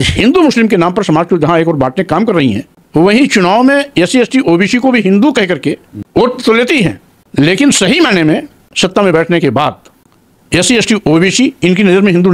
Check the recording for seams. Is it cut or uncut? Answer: uncut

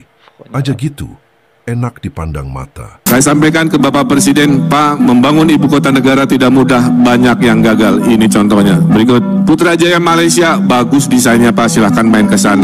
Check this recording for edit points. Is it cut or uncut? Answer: cut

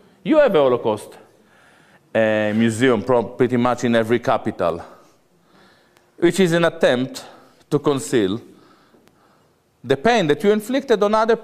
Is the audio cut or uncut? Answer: uncut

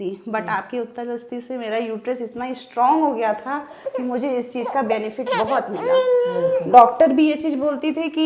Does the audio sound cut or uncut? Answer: uncut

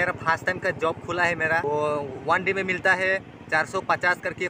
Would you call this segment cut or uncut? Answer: cut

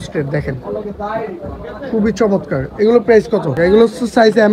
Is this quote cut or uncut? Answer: cut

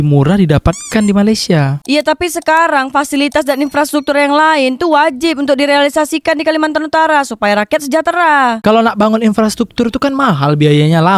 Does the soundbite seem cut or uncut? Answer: uncut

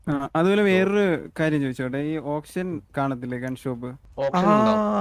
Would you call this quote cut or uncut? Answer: cut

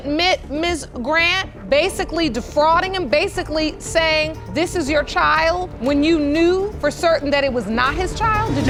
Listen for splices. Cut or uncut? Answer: uncut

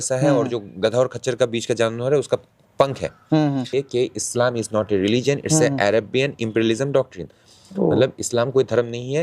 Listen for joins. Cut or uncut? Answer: cut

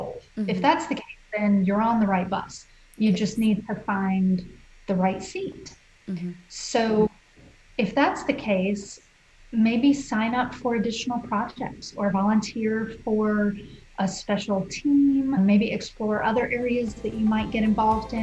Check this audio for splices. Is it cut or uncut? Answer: uncut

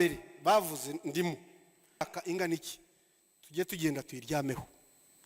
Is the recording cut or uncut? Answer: cut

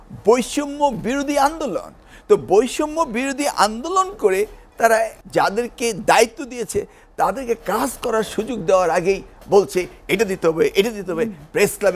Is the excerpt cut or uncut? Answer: cut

